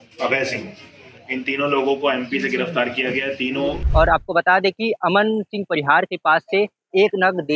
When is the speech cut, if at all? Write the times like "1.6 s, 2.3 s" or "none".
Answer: 4.0 s